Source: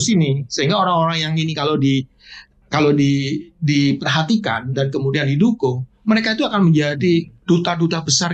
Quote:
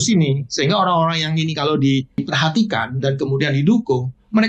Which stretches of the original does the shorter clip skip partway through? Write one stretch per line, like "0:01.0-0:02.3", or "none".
0:02.2-0:04.0

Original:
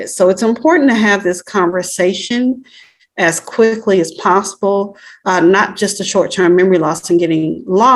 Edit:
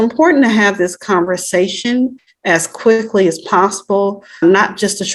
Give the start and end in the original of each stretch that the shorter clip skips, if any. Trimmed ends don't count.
0:02.7-0:03.0
0:05.1-0:05.4

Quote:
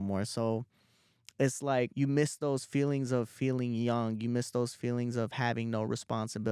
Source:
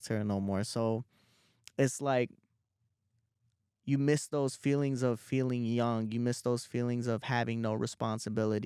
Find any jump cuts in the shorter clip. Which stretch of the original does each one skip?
0:02.3-0:03.8

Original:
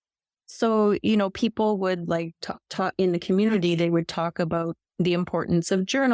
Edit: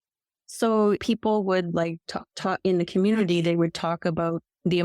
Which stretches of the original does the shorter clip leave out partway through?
0:01.0-0:01.3

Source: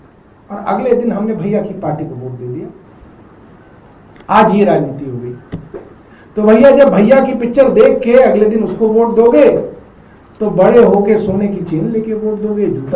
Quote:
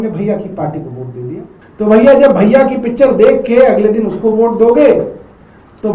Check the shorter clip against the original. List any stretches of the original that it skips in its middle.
0:02.8-0:06.1

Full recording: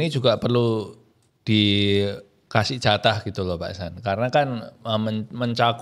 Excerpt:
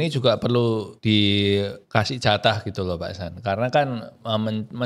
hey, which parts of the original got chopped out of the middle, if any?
0:00.9-0:01.3
0:02.2-0:02.4

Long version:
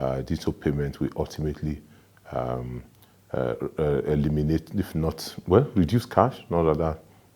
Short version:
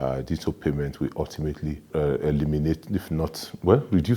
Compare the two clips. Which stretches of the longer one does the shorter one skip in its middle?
0:01.9-0:03.7

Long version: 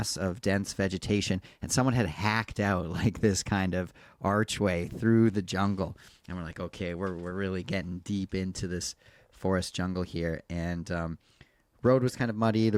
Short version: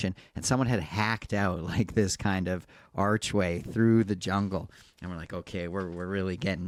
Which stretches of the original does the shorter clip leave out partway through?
none

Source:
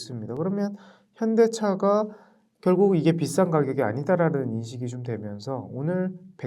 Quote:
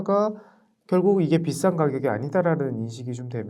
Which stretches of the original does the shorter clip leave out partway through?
none

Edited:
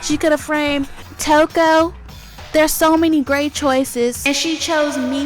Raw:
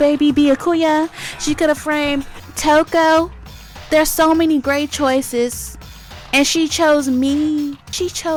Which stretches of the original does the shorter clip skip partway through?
0:05.6-0:06.3

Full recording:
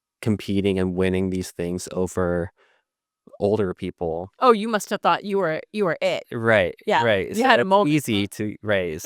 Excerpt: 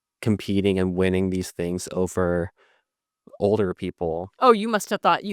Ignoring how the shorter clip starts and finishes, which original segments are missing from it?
none

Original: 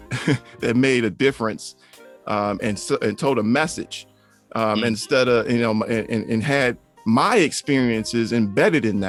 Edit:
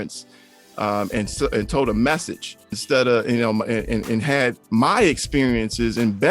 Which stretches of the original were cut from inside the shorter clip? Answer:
0:04.3-0:05.0
0:06.8-0:07.0

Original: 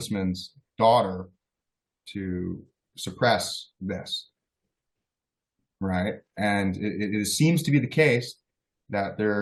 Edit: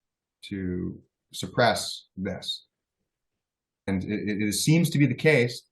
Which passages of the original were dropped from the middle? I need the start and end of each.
0:05.5-0:06.6

